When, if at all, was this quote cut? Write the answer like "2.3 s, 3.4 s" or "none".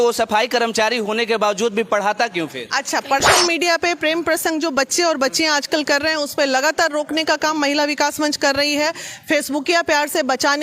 3.2 s